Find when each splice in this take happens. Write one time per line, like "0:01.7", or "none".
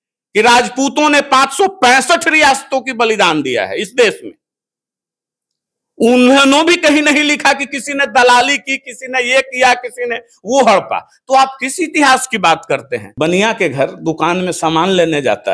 0:13.1